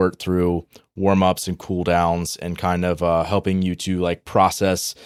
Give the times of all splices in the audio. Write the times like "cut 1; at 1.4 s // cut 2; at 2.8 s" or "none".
none

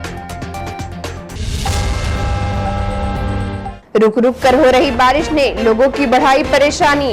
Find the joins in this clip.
cut 1; at 3.7 s

